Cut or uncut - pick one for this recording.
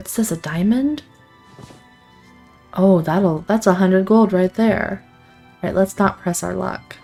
uncut